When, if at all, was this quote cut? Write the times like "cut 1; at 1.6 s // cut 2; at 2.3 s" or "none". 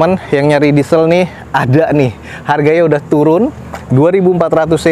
none